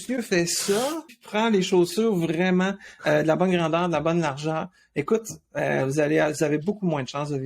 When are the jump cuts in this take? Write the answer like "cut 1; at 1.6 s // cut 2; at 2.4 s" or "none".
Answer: cut 1; at 1.2 s